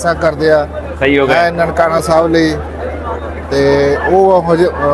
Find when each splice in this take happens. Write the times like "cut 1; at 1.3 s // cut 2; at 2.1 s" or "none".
none